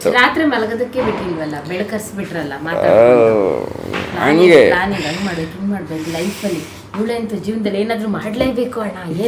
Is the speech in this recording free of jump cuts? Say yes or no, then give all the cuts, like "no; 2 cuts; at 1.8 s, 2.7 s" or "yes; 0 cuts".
yes; 0 cuts